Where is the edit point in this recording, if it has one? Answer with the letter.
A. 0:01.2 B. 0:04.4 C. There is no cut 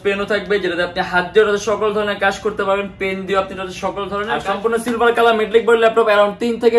B